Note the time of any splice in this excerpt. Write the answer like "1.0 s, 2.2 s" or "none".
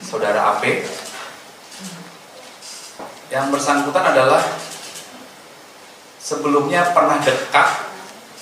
3.1 s

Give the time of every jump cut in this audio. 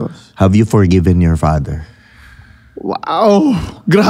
none

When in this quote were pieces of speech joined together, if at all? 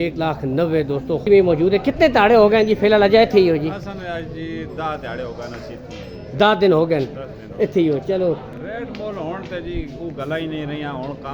1.3 s, 8.5 s

